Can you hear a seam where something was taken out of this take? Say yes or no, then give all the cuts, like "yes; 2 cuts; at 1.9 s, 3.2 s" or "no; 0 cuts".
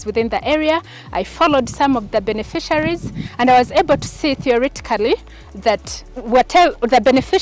no; 0 cuts